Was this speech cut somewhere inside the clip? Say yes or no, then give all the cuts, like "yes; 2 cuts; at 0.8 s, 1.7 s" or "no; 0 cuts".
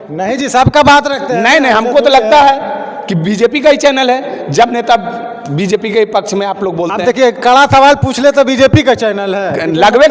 no; 0 cuts